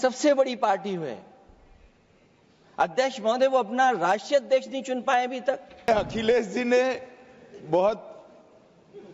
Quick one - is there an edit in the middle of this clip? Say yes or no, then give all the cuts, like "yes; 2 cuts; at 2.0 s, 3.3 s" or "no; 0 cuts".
yes; 1 cut; at 5.9 s